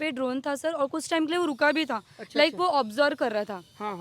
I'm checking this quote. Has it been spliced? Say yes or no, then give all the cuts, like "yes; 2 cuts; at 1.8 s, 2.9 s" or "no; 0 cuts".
no; 0 cuts